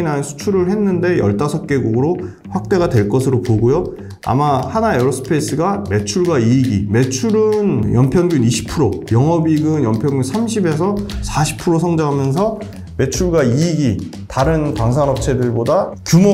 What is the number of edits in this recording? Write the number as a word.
zero